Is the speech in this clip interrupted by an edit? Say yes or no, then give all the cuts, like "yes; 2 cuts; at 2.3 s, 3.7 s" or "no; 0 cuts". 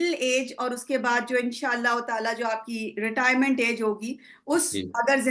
no; 0 cuts